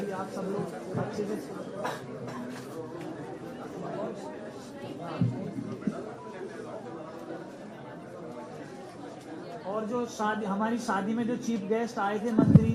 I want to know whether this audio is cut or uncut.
uncut